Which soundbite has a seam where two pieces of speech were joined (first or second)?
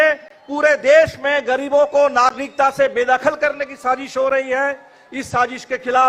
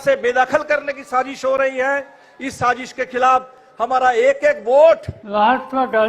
second